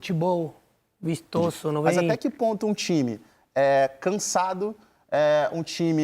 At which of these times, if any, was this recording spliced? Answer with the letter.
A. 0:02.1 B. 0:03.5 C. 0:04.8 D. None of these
A